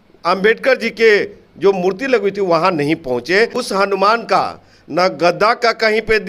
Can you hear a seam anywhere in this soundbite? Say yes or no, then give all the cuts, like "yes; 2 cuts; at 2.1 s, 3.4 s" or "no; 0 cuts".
yes; 1 cut; at 3.6 s